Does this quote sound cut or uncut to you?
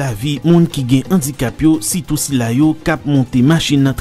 uncut